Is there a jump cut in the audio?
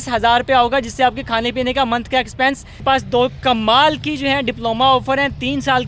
yes; 1 cut; at 2.8 s

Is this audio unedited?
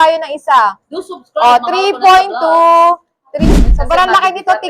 no; 1 cut; at 3.3 s

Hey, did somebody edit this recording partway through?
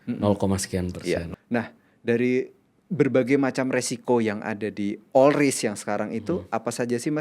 yes; 1 cut; at 1.3 s

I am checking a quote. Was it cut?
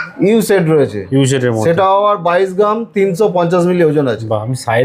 no; 0 cuts

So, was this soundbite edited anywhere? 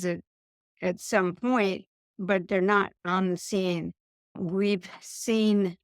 yes; 1 cut; at 2.9 s

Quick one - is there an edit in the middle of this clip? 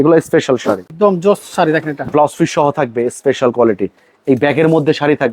yes; 1 cut; at 0.9 s

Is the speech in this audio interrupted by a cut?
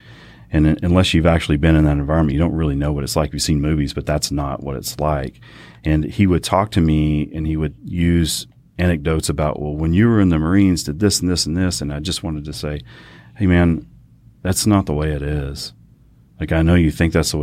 no; 0 cuts

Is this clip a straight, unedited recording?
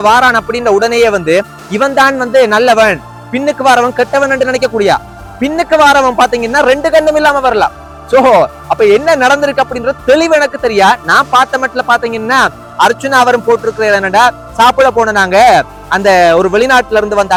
yes; 0 cuts

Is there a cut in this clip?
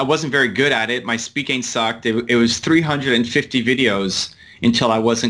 no; 0 cuts

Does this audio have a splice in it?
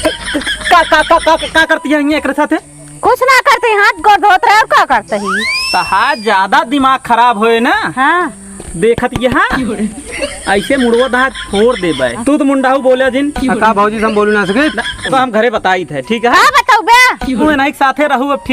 yes; 3 cuts; at 12.2 s, 15.1 s, 17.4 s

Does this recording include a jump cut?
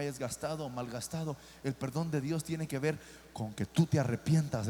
no; 0 cuts

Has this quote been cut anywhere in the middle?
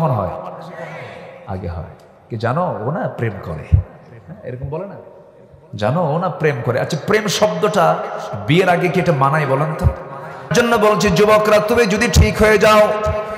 yes; 1 cut; at 10.4 s

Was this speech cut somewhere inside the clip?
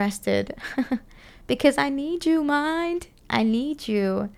no; 0 cuts

